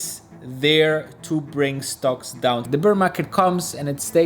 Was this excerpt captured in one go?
no; 1 cut; at 2.6 s

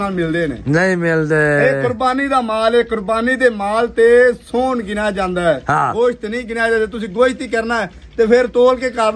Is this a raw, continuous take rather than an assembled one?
yes; 0 cuts

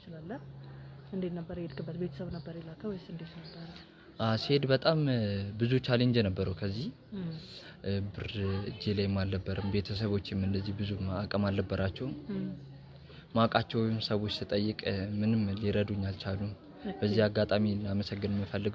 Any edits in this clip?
no; 0 cuts

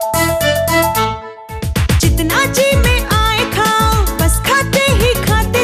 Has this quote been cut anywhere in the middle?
no; 0 cuts

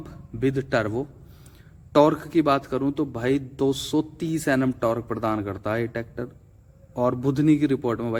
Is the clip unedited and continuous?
yes; 0 cuts

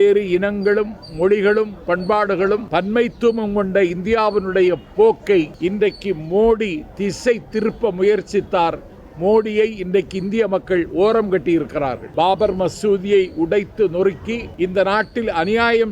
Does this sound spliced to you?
yes; 4 cuts; at 2.6 s, 5.5 s, 12.0 s, 14.5 s

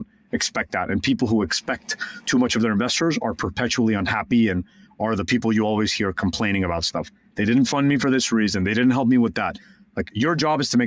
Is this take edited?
no; 0 cuts

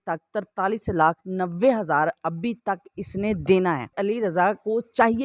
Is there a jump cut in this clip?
yes; 1 cut; at 4.0 s

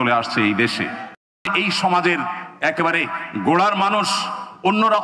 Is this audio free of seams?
no; 1 cut; at 1.5 s

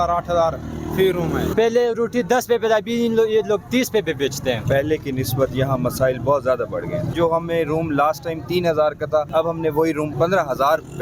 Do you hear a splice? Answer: yes; 5 cuts; at 1.5 s, 4.6 s, 7.1 s, 9.3 s, 10.1 s

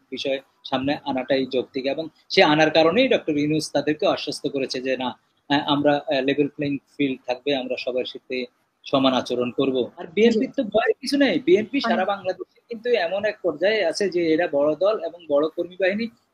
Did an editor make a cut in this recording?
yes; 1 cut; at 10.0 s

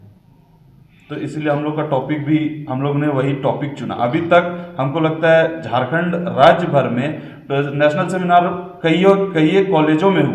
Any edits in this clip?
no; 0 cuts

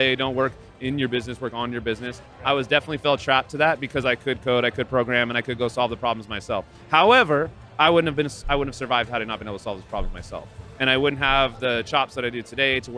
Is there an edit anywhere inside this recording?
no; 0 cuts

